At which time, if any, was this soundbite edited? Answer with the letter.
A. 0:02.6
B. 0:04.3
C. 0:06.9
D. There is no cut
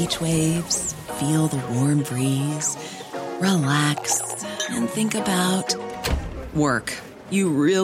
D